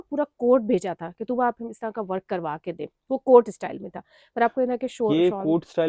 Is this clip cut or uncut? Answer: uncut